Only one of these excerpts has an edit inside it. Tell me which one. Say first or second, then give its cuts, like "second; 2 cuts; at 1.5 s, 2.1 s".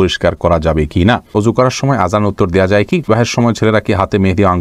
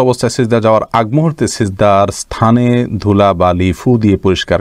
first; 2 cuts; at 1.3 s, 3.1 s